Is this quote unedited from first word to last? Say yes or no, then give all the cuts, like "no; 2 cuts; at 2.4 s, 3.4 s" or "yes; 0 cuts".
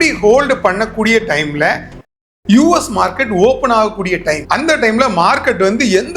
no; 1 cut; at 2.1 s